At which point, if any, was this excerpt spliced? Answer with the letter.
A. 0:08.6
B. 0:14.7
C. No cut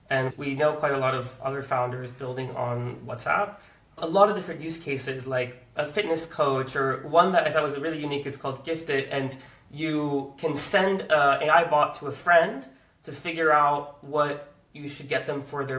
C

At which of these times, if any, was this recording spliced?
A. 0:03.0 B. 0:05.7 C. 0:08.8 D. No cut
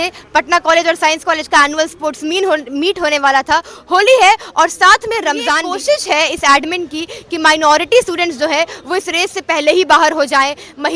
B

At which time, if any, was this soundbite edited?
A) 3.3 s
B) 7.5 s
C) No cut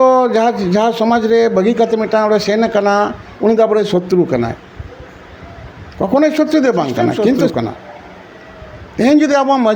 B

